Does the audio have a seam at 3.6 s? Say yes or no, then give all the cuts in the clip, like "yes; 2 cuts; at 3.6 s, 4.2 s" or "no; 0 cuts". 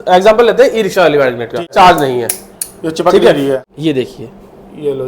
yes; 2 cuts; at 1.7 s, 3.6 s